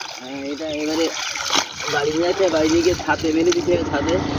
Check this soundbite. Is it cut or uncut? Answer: uncut